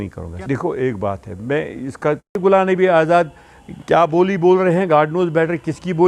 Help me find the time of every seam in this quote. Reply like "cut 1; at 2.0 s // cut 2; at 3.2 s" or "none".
cut 1; at 2.4 s